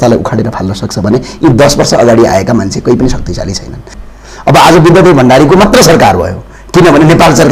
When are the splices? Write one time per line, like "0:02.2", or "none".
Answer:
0:03.9